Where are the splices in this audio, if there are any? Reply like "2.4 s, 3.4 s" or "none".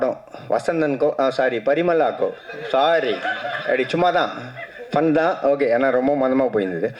none

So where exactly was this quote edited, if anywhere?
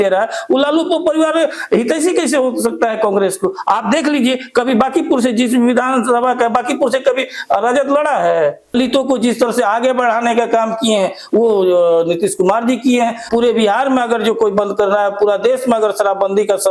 8.7 s, 13.2 s

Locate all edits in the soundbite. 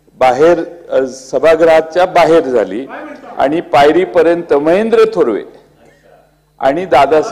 none

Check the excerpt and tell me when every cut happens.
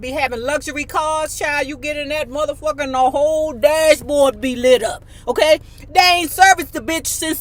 none

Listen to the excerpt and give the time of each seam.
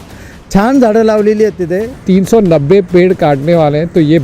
1.9 s

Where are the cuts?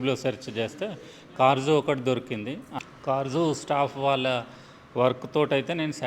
2.6 s

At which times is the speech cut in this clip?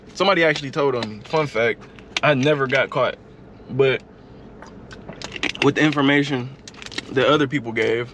none

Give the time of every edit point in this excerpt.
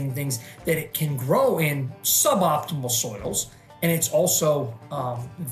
none

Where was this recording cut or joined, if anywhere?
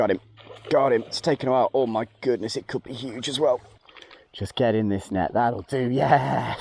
3.7 s

